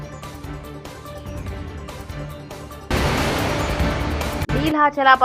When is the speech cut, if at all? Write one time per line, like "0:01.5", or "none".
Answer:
0:02.9
0:04.4